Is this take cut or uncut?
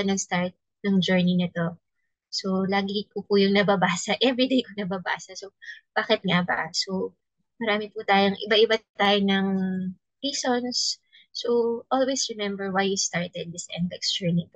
uncut